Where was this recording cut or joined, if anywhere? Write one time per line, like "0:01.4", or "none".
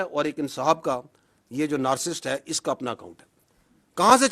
none